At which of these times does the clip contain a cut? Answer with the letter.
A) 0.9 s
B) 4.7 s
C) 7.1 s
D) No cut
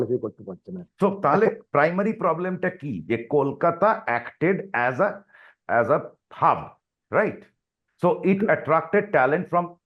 D